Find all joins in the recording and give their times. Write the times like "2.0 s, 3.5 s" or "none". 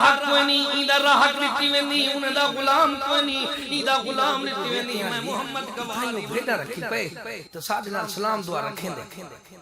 6.0 s